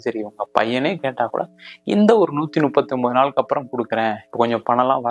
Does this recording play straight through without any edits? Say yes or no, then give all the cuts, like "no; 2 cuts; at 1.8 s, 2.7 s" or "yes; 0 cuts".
yes; 0 cuts